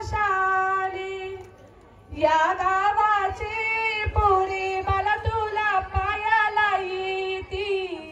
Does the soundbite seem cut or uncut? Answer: uncut